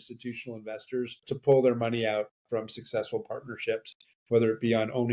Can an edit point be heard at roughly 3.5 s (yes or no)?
no